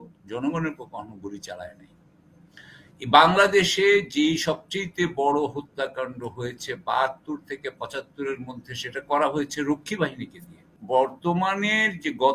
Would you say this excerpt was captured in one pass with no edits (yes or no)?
no